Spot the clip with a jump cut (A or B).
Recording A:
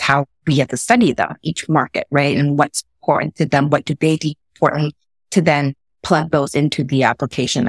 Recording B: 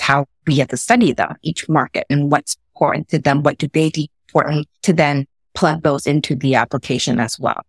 B